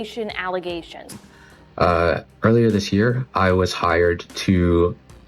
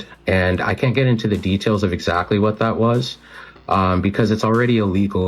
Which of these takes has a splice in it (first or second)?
first